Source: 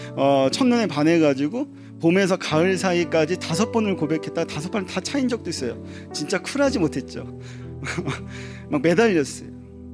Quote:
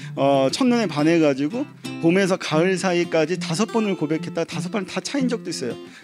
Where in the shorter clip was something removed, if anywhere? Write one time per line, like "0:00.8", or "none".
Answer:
none